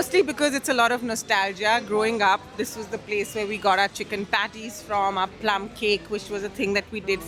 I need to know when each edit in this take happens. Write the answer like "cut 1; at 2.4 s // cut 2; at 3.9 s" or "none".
none